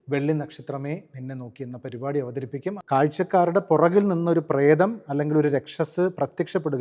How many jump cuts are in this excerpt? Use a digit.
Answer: 1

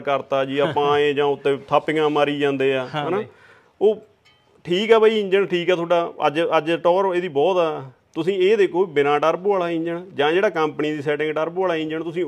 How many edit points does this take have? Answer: 0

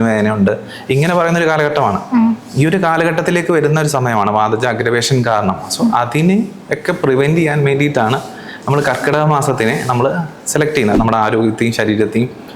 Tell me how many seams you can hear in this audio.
1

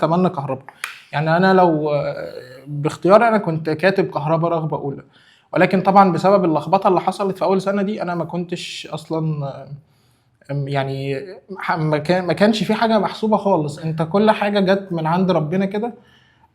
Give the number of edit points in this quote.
0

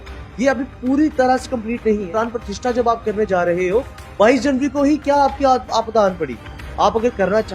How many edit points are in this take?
1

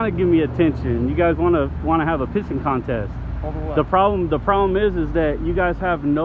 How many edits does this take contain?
0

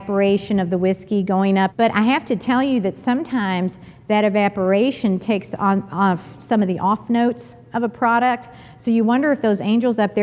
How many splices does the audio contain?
1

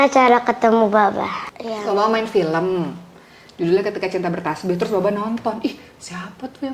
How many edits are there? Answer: 1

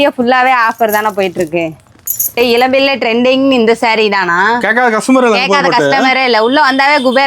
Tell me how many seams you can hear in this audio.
1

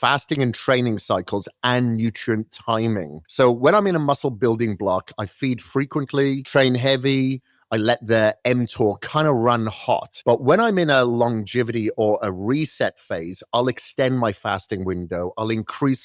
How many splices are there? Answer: 3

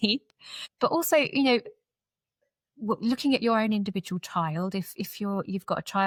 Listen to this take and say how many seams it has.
0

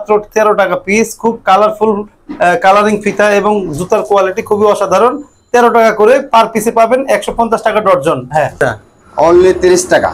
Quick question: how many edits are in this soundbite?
0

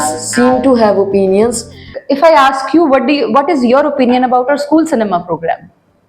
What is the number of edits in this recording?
1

